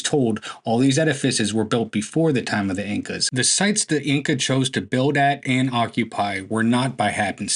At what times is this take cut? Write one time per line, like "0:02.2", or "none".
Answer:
0:03.2

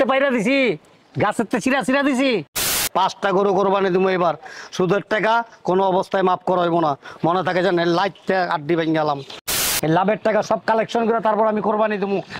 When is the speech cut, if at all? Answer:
0:02.7
0:09.7

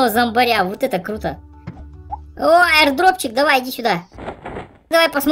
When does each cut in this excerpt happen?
0:02.2

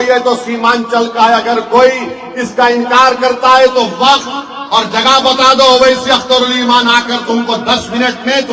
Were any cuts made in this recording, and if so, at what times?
none

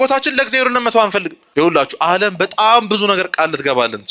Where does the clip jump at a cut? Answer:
0:01.6

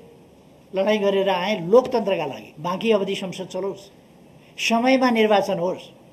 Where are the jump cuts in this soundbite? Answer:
0:02.5

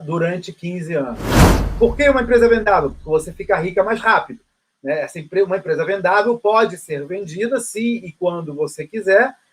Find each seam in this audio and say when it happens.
0:01.3

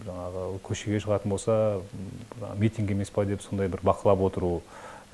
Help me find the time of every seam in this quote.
none

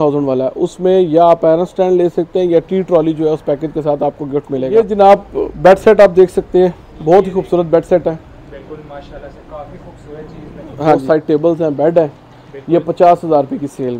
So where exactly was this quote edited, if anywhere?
0:04.7
0:11.0

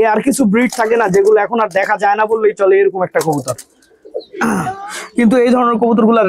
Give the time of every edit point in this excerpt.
0:04.5

